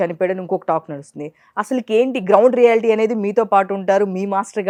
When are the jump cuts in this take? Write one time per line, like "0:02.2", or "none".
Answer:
none